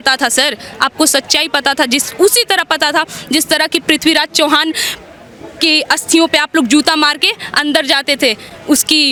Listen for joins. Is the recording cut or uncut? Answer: uncut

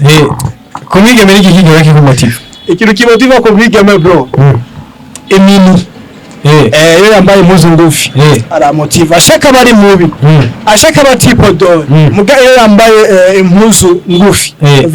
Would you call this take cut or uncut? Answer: uncut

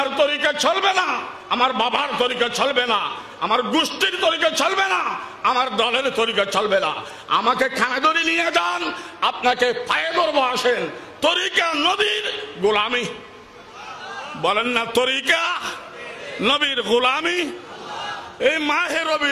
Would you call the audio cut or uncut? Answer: cut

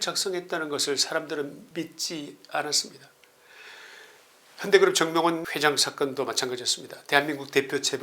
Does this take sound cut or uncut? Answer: cut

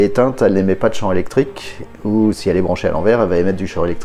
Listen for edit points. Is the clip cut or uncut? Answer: uncut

